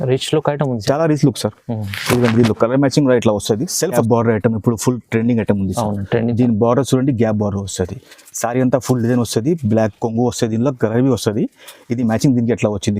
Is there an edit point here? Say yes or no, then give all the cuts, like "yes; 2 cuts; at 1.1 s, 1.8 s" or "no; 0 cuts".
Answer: yes; 1 cut; at 4.0 s